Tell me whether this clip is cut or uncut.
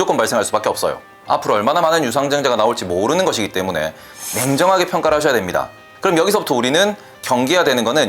cut